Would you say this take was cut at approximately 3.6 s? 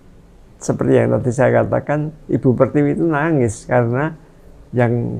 no; 0 cuts

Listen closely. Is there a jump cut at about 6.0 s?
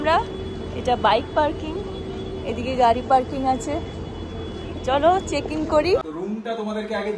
yes; 1 cut; at 6.0 s

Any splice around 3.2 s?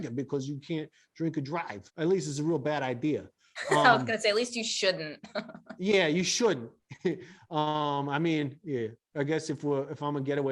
no; 1 cut; at 1.8 s

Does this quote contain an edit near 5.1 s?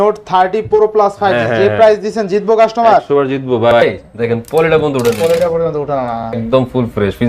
no; 2 cuts; at 3.8 s, 6.3 s

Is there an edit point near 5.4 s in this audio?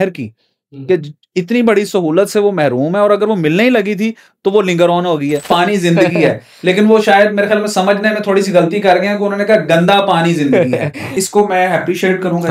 yes; 2 cuts; at 5.4 s, 11.2 s

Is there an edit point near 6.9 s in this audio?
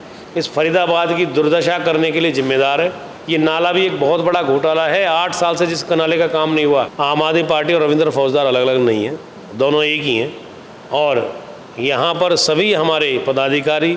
yes; 2 cuts; at 3.1 s, 6.9 s

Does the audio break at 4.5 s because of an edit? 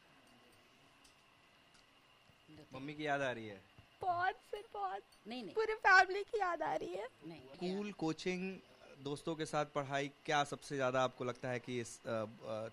no; 1 cut; at 7.5 s

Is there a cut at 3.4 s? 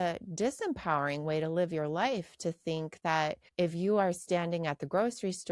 yes; 1 cut; at 3.4 s

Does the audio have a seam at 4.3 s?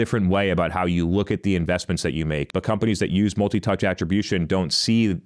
no; 1 cut; at 2.5 s

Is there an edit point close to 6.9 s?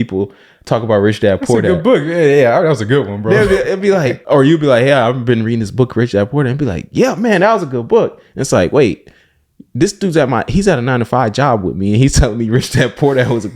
no; 1 cut; at 4.2 s

